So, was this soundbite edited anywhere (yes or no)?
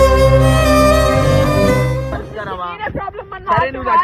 yes